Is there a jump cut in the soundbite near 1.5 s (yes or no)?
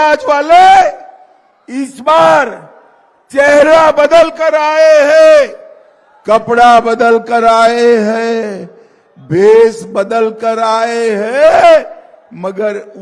no